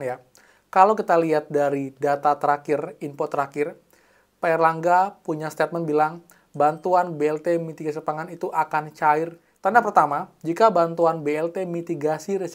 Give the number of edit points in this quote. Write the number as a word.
one